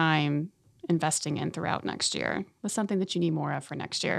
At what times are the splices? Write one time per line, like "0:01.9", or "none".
0:02.5